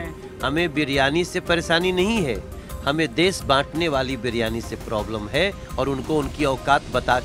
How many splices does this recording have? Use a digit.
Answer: 0